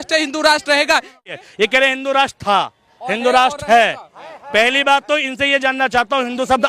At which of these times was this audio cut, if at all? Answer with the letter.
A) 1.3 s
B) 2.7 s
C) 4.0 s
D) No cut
A